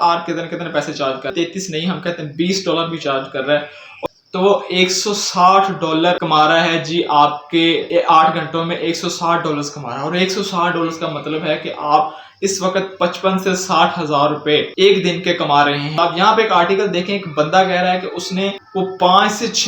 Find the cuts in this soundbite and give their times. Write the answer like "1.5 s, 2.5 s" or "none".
1.3 s, 3.9 s, 16.0 s